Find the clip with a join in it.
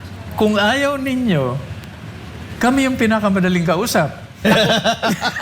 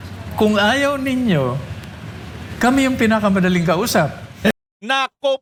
first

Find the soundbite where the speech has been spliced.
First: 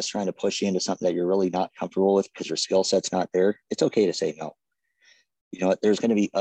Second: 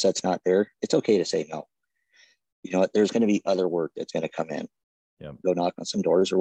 second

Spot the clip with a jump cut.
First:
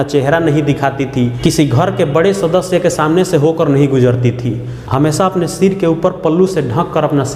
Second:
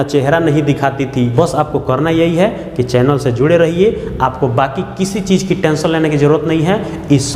second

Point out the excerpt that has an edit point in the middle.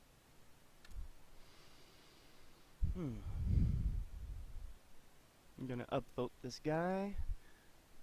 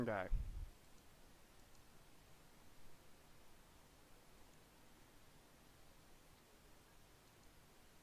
second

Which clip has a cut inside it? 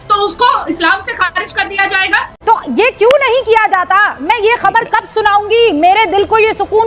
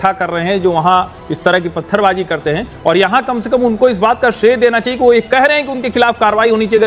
first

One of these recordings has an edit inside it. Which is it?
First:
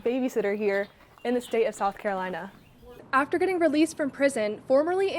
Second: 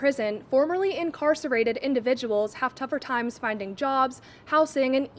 first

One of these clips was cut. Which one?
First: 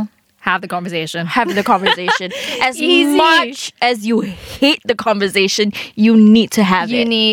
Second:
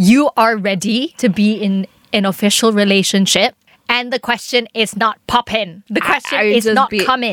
second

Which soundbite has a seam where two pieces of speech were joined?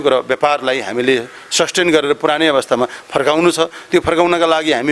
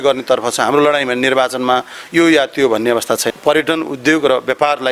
second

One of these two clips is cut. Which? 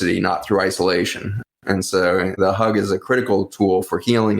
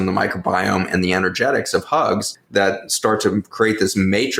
first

